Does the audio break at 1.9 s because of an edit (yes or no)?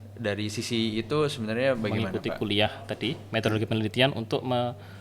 yes